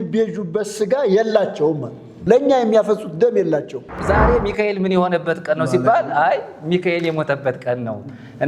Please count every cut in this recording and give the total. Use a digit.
2